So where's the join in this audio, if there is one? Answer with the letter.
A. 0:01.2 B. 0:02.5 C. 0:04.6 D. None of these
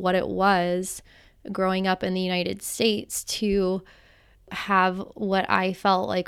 C